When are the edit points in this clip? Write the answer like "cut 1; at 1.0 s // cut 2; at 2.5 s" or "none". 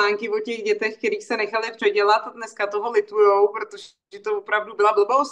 none